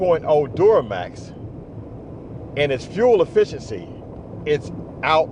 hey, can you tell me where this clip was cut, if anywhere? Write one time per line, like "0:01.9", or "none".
none

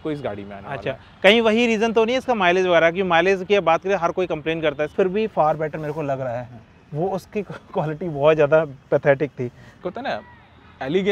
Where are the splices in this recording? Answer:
0:04.9
0:09.7

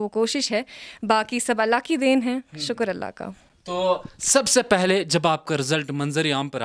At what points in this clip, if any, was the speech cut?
none

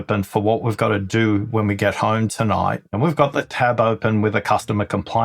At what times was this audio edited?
0:02.9

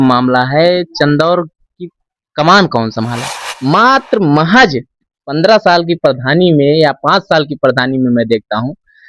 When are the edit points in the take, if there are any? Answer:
0:03.5

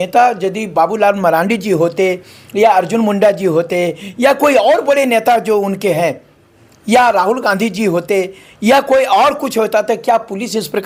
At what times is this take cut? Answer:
none

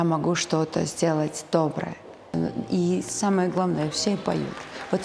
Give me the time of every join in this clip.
0:02.3

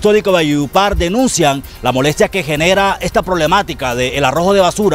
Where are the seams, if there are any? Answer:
none

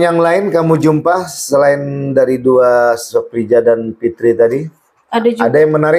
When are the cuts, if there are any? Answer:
none

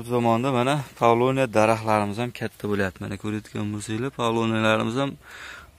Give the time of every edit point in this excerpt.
none

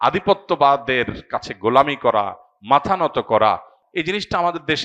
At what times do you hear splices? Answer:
0:03.8

